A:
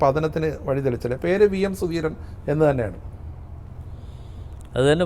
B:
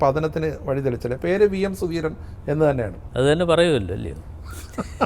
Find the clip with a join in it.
B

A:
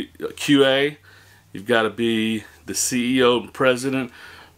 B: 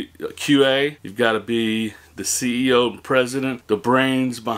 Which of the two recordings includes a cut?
B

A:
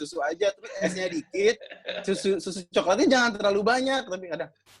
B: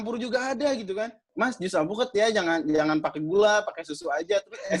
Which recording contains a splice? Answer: B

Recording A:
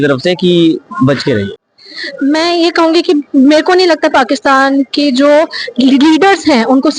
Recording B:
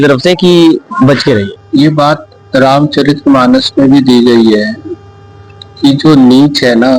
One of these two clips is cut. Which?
B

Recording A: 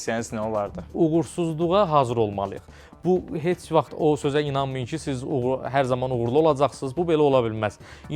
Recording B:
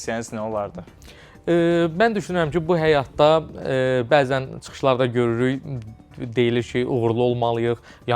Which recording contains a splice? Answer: A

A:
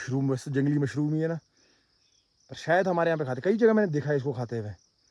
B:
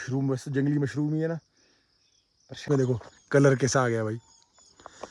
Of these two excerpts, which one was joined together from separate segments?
B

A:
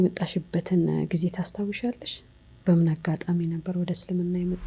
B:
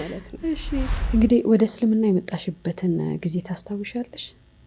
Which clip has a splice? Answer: B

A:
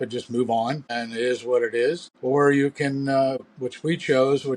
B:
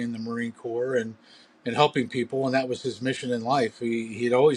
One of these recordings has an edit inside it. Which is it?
A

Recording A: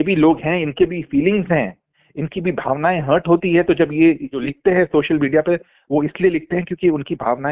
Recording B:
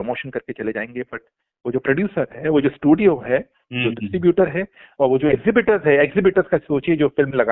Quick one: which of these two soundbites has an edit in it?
A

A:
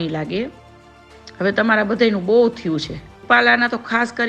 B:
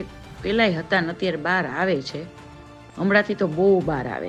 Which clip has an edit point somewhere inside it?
A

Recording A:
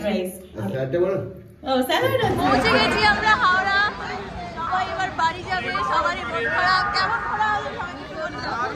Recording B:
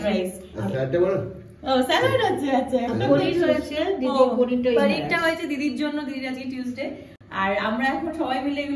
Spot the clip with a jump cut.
A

